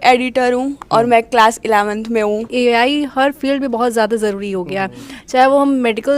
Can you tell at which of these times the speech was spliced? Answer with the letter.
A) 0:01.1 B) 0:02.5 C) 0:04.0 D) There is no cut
B